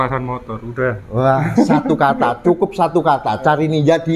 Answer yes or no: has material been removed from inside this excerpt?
no